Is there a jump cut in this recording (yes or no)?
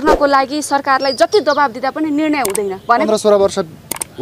yes